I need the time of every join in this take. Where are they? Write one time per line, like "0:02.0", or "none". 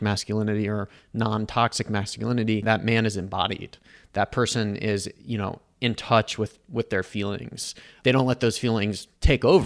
0:02.6